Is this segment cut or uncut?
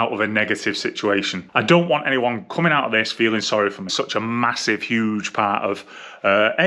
cut